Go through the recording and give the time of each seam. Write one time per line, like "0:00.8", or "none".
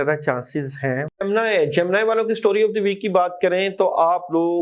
0:01.1